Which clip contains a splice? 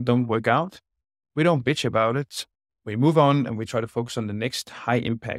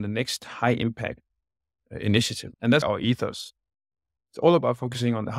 second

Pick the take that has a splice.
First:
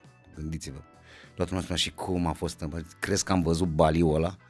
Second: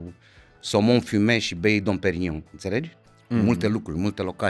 second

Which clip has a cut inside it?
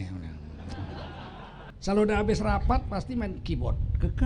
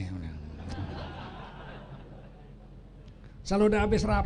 first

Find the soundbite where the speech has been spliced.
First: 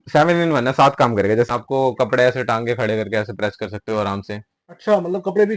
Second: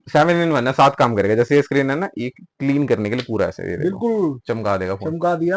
first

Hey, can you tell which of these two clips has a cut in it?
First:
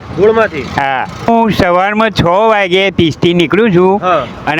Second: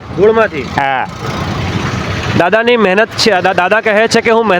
first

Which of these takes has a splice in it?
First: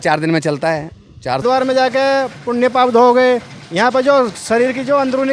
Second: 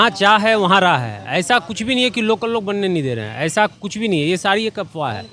first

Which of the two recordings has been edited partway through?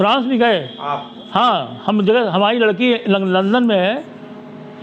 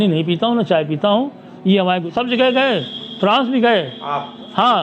second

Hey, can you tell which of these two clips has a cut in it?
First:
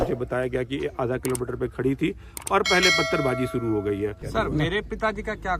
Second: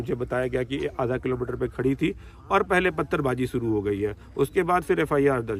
first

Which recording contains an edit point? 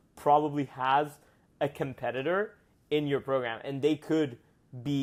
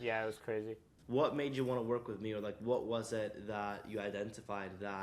second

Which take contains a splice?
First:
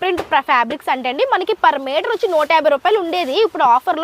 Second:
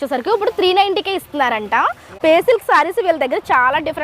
second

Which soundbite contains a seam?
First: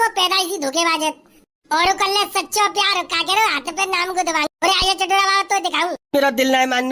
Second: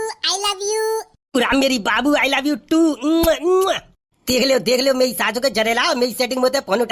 first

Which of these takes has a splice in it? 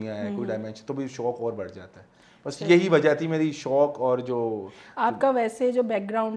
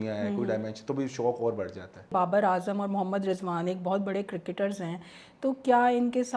second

